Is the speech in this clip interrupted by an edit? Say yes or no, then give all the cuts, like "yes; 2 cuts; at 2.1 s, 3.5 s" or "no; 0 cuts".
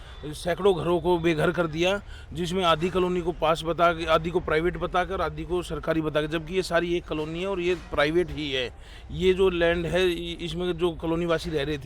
no; 0 cuts